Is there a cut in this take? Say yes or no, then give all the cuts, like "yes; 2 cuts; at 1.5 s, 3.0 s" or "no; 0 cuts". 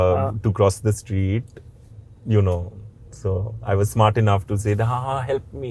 no; 0 cuts